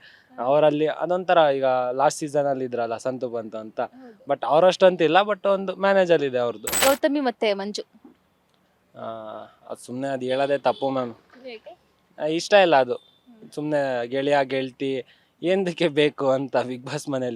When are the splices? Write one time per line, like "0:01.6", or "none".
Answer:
0:06.7